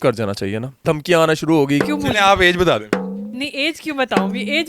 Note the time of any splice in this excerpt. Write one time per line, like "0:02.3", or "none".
0:00.8
0:01.8